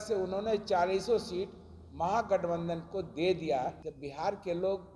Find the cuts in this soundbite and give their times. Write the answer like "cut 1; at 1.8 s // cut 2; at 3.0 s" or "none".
cut 1; at 3.8 s